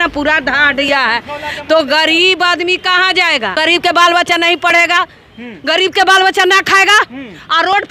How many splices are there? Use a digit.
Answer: 1